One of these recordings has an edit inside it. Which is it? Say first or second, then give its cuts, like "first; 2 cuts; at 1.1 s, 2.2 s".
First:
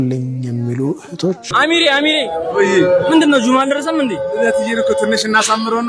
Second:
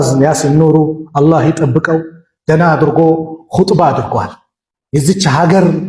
first; 1 cut; at 1.5 s